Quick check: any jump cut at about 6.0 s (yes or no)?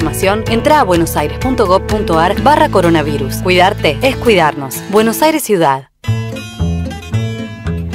yes